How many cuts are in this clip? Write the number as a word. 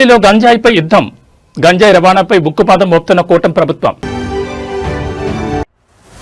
zero